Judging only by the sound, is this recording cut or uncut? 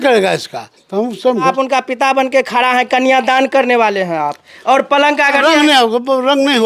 cut